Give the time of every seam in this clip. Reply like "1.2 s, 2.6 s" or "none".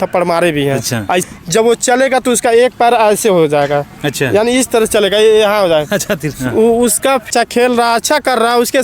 1.2 s, 7.2 s